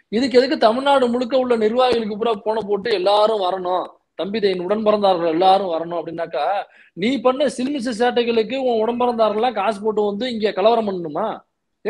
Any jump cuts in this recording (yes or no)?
no